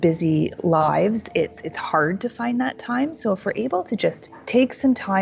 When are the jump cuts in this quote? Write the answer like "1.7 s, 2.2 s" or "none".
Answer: 4.3 s